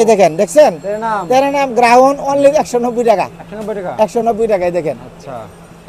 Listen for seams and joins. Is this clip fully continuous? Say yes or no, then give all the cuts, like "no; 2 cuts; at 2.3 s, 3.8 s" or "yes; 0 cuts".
yes; 0 cuts